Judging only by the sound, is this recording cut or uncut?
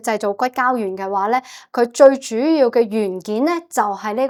uncut